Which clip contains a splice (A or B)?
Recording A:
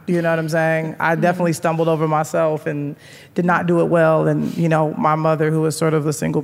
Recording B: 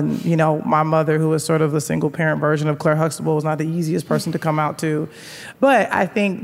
B